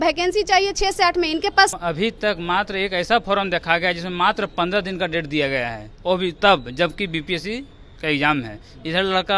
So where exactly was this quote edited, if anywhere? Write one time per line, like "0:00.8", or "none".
0:01.7